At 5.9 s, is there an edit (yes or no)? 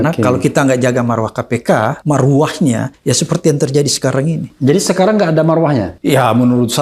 yes